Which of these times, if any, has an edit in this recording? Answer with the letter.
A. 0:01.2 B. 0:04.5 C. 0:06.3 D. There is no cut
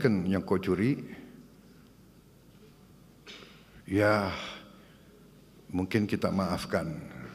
D